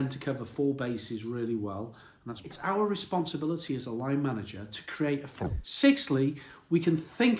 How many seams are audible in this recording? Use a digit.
2